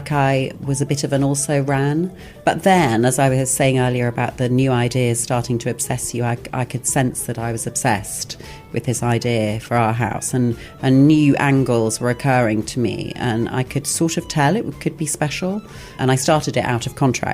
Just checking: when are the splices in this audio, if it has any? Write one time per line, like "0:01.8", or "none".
0:02.2
0:16.0